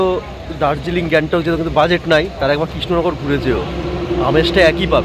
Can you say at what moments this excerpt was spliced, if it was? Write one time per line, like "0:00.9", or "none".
none